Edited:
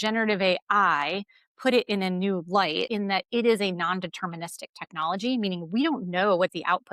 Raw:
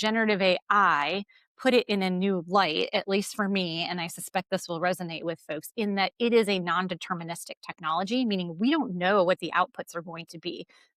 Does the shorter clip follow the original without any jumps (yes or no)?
no